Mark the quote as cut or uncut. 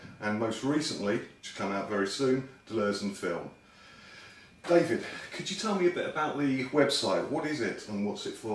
cut